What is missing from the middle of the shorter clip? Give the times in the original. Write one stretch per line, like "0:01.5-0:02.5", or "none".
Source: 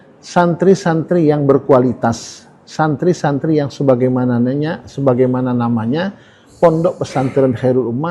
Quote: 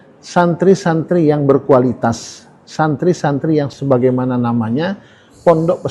0:03.7-0:04.9